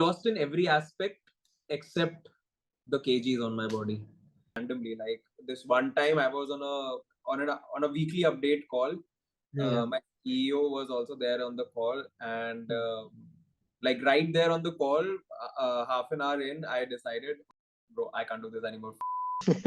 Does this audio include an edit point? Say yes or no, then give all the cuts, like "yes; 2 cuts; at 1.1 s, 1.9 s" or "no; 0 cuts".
yes; 1 cut; at 4.6 s